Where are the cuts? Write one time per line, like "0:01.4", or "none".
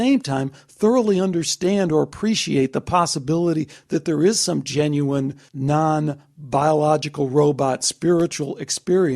0:05.5